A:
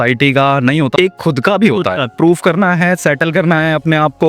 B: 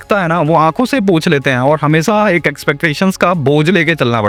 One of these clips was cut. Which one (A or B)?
A